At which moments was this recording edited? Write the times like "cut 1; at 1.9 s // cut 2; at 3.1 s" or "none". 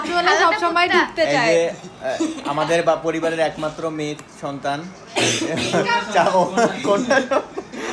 none